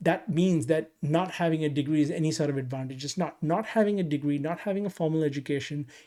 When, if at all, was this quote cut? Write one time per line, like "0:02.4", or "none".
none